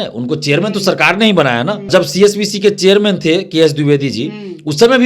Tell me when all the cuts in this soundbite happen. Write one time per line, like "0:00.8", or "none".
0:01.8